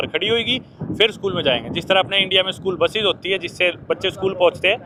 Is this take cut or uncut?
uncut